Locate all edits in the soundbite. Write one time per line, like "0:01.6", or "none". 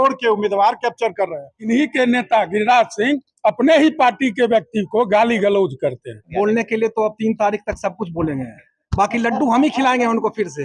0:01.6
0:06.3